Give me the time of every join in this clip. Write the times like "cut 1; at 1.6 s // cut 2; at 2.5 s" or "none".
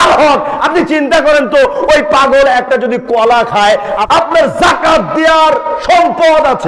cut 1; at 3.9 s